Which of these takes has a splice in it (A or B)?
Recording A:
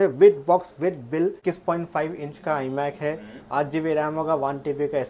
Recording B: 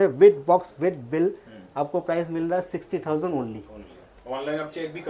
A